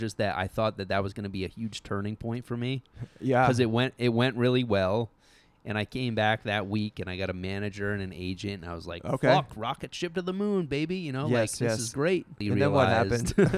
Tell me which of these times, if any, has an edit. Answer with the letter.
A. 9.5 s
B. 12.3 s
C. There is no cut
B